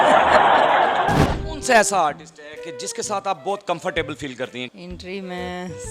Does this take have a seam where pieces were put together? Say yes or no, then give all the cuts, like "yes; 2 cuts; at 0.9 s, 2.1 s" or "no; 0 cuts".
yes; 2 cuts; at 1.5 s, 4.7 s